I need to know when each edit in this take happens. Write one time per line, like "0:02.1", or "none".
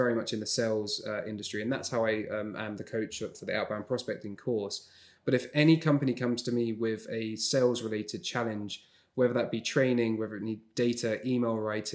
none